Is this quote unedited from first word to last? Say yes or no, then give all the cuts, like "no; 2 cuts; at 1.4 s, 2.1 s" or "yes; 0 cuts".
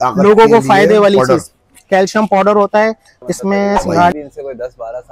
no; 1 cut; at 4.1 s